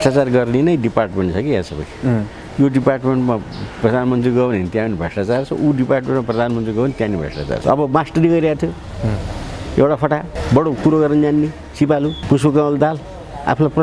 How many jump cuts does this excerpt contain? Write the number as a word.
three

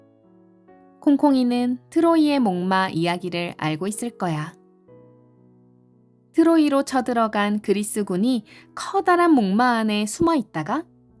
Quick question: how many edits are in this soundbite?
one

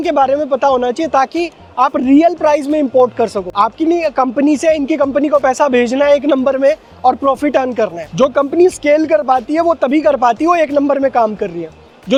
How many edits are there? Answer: zero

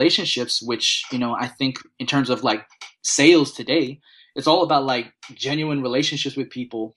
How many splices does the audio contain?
zero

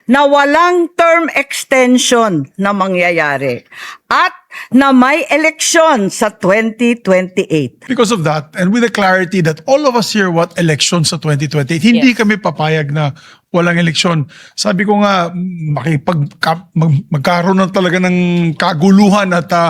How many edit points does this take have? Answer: one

